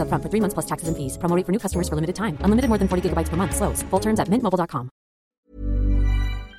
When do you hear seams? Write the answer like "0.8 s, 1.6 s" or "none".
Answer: 5.3 s